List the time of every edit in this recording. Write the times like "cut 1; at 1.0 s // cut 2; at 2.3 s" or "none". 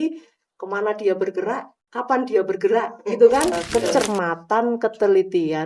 cut 1; at 3.7 s